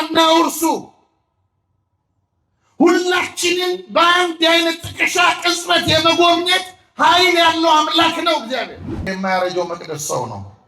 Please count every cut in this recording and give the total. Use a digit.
1